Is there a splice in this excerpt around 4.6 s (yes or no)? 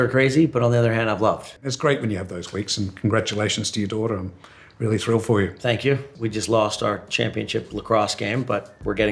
no